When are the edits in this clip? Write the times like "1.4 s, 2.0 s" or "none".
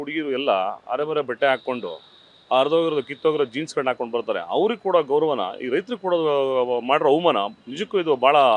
none